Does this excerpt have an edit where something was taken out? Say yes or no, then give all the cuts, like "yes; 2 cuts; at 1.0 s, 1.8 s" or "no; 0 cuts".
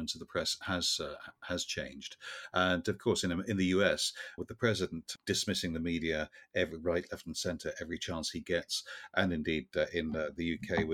no; 0 cuts